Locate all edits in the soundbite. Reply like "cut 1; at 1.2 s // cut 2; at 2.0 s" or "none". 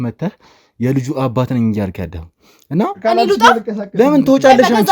cut 1; at 3.0 s